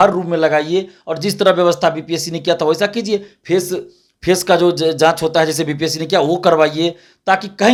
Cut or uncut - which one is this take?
uncut